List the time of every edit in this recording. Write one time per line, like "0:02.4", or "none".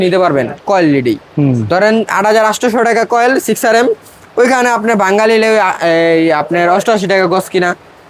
none